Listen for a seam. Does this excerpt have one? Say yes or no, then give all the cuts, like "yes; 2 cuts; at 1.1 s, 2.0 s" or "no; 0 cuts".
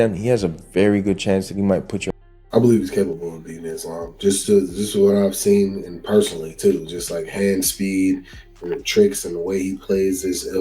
yes; 1 cut; at 2.3 s